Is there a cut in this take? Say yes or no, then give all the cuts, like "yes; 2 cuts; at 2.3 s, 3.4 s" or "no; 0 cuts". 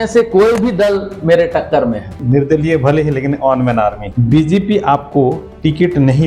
yes; 2 cuts; at 2.2 s, 4.1 s